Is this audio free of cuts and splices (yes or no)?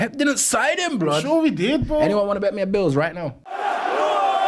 no